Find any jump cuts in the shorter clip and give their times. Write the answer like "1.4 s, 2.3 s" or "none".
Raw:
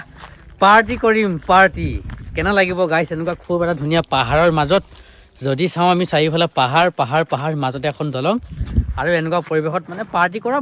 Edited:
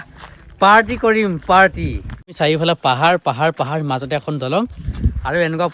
2.3 s